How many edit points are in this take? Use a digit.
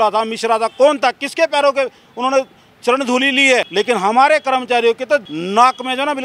2